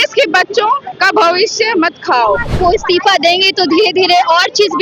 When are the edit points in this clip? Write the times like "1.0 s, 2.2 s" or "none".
2.6 s